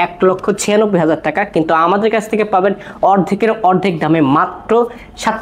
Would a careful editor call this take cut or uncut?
uncut